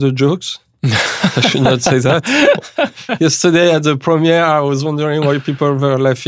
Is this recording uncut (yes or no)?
yes